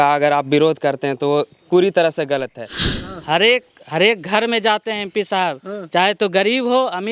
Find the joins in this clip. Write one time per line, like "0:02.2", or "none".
0:02.9